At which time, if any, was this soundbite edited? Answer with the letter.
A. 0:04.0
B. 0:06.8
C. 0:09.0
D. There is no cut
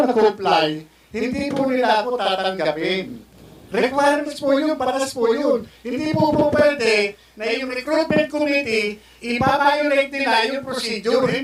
D